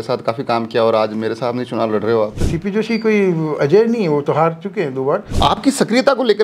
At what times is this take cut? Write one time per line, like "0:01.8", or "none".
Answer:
0:02.5
0:05.3